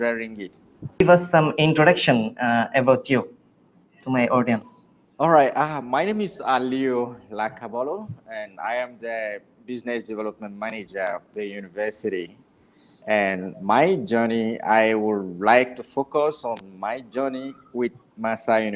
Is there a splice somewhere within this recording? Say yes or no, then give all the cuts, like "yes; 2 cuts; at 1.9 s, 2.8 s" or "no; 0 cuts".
yes; 1 cut; at 1.0 s